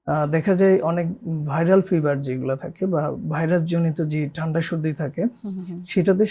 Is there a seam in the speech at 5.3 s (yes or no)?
no